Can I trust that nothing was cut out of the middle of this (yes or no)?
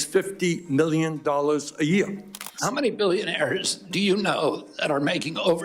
no